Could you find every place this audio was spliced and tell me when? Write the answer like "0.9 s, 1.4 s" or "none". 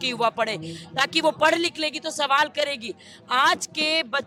none